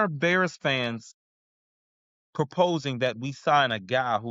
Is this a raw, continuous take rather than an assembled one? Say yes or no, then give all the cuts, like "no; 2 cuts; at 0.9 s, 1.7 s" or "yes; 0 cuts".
yes; 0 cuts